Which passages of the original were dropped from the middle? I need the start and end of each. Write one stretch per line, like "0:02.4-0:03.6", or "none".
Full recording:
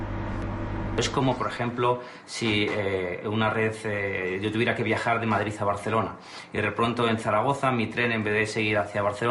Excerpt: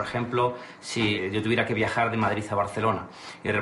0:02.6-0:04.3

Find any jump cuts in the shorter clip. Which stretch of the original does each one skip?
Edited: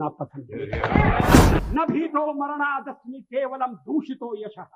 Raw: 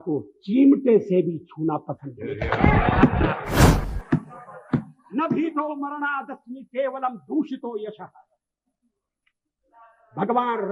0:03.3-0:05.1

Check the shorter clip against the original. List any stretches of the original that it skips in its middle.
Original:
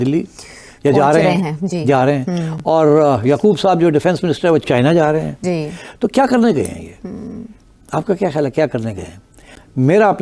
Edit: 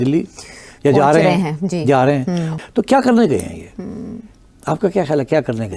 0:02.5-0:05.8

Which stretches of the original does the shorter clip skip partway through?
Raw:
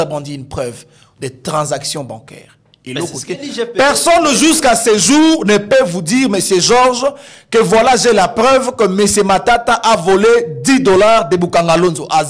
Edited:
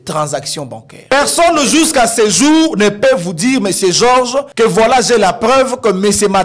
0:02.5-0:03.8
0:07.2-0:07.4

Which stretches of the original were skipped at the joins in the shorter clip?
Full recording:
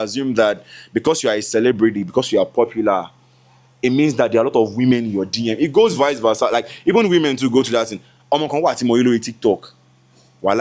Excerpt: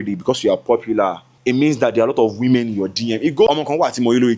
0:03.2-0:03.6
0:05.8-0:08.3

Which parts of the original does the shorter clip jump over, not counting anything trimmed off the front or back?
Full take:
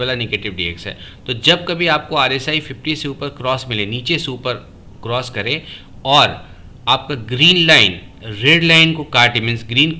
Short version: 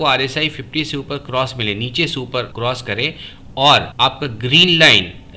0:04.6-0:05.0
0:06.4-0:06.8

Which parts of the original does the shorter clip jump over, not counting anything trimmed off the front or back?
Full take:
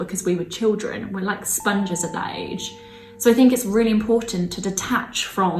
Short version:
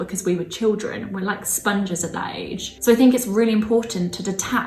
0:02.6-0:03.0

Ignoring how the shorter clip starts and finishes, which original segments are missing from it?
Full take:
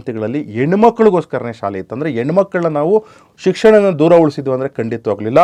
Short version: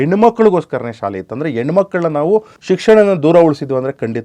0:03.1-0:03.3

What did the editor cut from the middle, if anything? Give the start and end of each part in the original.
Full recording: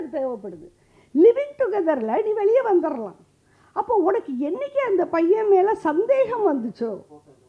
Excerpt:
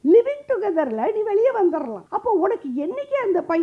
0:03.1-0:03.7

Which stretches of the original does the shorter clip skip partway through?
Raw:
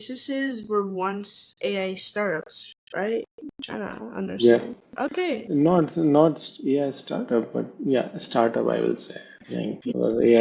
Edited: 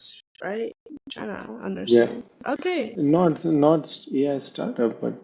none

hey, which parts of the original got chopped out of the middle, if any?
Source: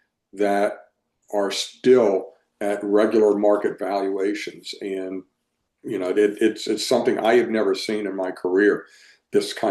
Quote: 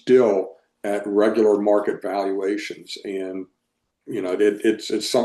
none

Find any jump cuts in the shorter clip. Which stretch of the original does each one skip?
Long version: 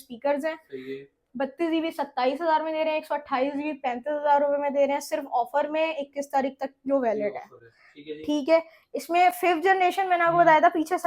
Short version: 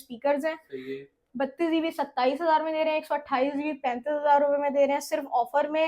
none

